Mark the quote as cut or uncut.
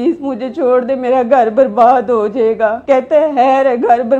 cut